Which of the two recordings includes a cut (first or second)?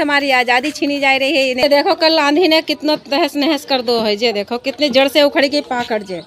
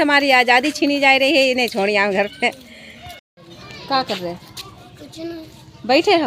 first